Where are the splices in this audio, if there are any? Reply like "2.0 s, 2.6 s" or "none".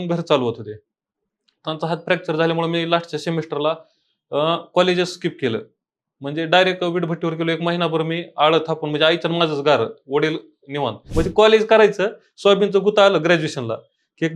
11.1 s